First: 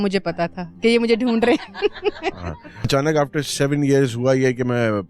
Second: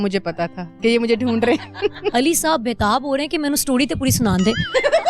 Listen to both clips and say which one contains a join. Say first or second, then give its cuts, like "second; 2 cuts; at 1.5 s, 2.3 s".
second; 1 cut; at 2.1 s